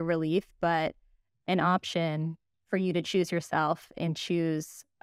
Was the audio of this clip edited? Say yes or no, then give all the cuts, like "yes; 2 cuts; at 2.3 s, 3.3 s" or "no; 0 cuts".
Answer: no; 0 cuts